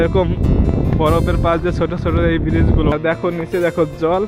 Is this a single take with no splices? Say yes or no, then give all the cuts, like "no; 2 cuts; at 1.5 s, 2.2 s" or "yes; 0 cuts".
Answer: no; 1 cut; at 2.9 s